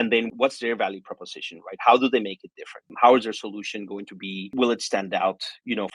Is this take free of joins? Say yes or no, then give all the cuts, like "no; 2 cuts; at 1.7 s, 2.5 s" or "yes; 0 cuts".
yes; 0 cuts